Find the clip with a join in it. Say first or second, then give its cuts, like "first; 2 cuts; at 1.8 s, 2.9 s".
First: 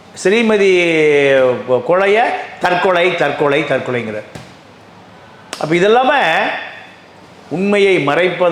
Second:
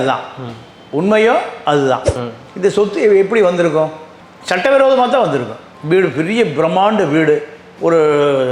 second; 1 cut; at 2.1 s